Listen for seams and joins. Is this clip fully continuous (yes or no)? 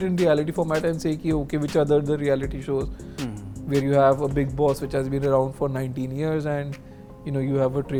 yes